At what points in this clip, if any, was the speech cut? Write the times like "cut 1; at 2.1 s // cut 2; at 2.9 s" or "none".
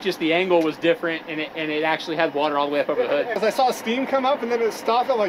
cut 1; at 3.4 s